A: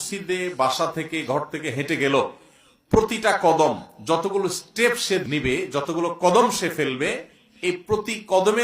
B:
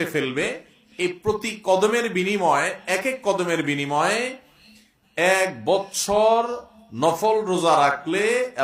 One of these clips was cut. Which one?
A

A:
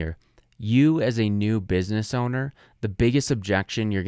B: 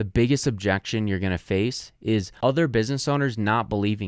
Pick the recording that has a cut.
B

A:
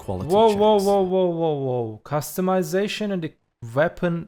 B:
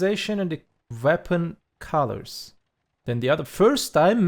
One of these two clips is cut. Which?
B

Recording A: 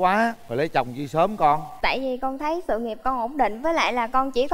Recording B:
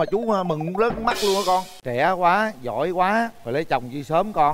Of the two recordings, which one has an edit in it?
B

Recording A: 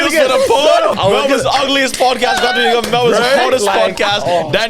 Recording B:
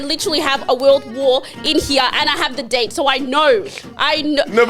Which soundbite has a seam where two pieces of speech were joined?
A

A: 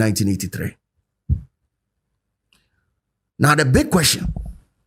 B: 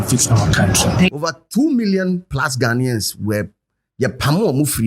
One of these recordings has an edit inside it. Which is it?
B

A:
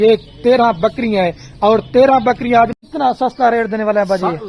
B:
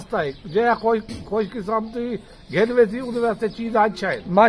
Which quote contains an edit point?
A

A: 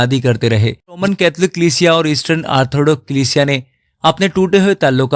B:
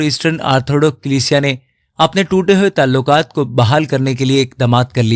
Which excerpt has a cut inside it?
A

